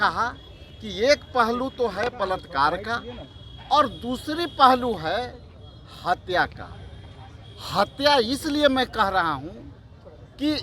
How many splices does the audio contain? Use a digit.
0